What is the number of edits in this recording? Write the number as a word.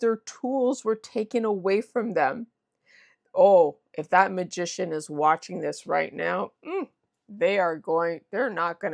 zero